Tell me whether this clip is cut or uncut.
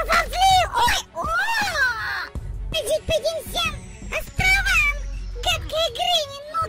cut